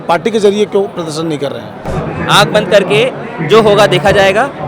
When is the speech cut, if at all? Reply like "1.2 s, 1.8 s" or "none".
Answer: 1.9 s